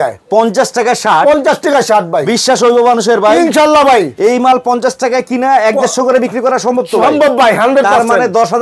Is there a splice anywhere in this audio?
no; 0 cuts

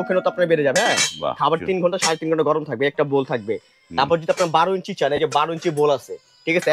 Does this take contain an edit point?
no; 0 cuts

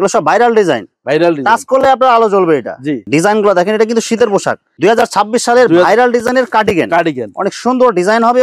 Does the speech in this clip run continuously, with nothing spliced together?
no; 2 cuts; at 3.0 s, 4.6 s

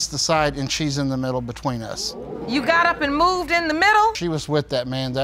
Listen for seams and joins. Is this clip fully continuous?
yes; 0 cuts

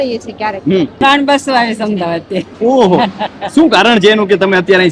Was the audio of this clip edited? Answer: yes; 1 cut; at 1.0 s

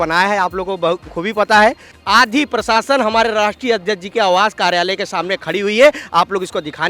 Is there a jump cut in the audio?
yes; 1 cut; at 1.9 s

